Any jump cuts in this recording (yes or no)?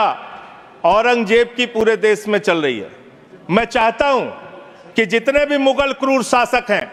no